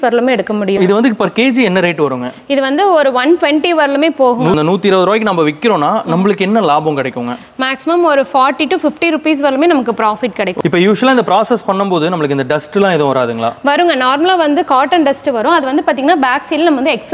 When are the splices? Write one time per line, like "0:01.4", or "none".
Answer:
0:00.8
0:04.6
0:10.6